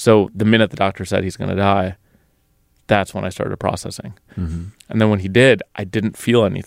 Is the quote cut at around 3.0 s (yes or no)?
no